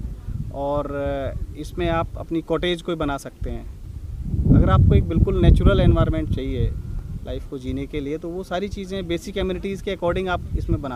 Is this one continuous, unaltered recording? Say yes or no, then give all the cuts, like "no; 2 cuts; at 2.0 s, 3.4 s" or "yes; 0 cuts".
yes; 0 cuts